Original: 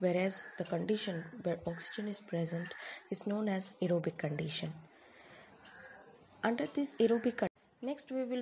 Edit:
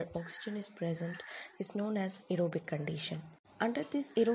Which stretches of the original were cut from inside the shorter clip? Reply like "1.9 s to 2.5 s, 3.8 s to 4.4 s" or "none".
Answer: 4.9 s to 6.2 s